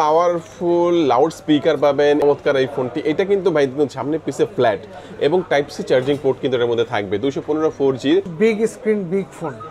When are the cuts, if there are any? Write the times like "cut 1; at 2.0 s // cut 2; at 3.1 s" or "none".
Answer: cut 1; at 2.2 s // cut 2; at 8.3 s